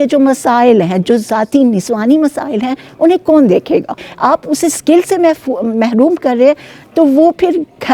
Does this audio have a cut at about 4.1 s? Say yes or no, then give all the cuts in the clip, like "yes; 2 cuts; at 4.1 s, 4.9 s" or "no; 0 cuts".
yes; 1 cut; at 4.1 s